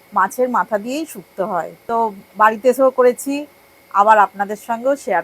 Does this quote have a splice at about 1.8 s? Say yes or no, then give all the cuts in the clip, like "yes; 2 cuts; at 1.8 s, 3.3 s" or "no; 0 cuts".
yes; 1 cut; at 1.8 s